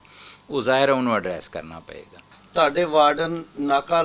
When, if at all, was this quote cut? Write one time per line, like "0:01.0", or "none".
0:02.4